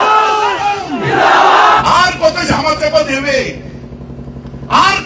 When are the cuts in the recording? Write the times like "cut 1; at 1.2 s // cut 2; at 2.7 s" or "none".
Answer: cut 1; at 1.8 s